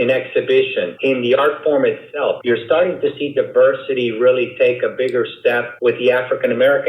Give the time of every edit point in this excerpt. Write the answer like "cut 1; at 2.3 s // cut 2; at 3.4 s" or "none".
cut 1; at 0.9 s // cut 2; at 2.4 s // cut 3; at 5.7 s

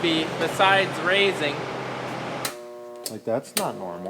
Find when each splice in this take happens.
cut 1; at 2.5 s

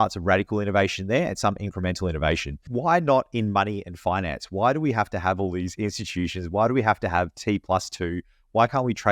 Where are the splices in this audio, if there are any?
cut 1; at 2.6 s

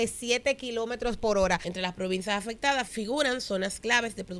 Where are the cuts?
cut 1; at 1.7 s // cut 2; at 2.9 s

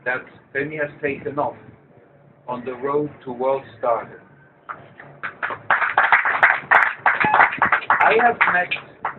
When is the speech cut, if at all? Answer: cut 1; at 5.6 s

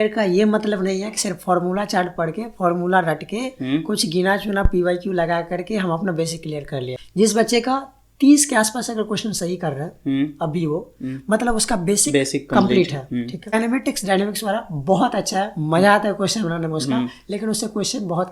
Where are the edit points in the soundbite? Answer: cut 1; at 7.0 s // cut 2; at 13.5 s

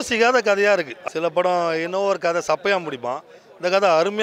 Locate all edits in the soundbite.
cut 1; at 0.9 s

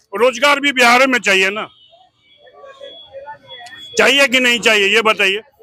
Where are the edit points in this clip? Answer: none

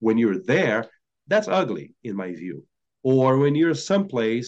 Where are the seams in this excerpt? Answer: none

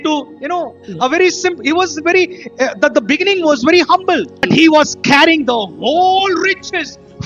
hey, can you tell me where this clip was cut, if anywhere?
cut 1; at 4.5 s

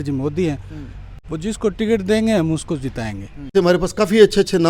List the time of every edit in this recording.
cut 1; at 3.5 s

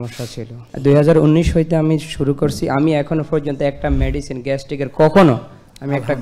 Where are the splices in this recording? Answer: none

